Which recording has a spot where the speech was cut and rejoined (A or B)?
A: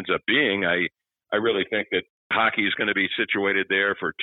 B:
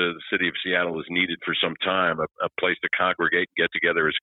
A